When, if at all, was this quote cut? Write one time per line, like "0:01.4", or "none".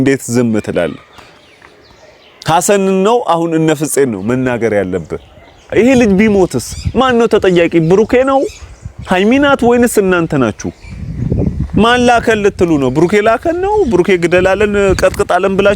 0:05.7